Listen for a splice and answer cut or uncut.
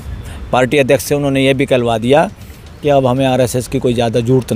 uncut